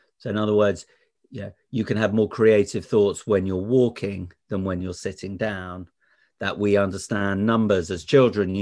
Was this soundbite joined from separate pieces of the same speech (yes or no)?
yes